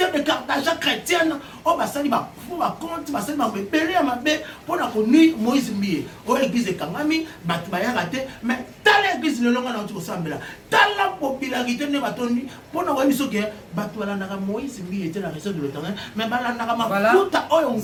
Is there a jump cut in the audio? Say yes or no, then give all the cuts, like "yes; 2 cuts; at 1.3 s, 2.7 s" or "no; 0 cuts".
no; 0 cuts